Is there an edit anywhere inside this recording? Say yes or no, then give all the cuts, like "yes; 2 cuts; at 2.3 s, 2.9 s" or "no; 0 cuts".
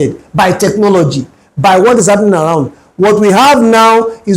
no; 0 cuts